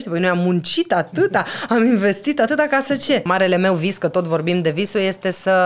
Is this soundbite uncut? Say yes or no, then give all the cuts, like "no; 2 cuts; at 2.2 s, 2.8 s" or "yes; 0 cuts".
no; 1 cut; at 3.2 s